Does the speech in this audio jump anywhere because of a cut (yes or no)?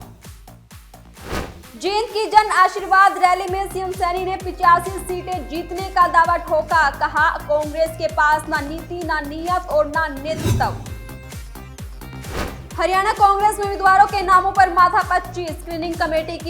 no